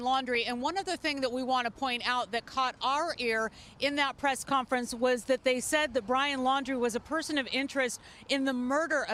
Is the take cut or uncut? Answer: uncut